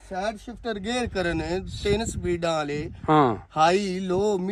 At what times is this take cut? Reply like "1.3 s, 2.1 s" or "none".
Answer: none